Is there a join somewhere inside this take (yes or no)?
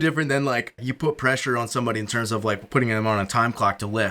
yes